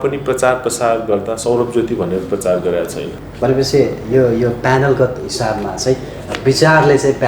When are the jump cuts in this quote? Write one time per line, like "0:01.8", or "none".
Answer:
0:03.2